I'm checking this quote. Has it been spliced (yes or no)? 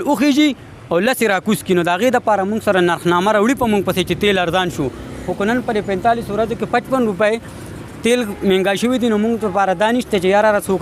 no